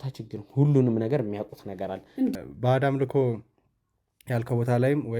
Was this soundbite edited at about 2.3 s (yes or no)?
yes